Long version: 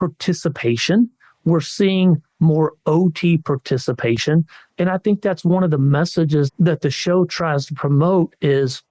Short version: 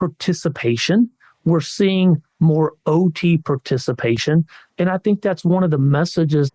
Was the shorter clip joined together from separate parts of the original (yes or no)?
no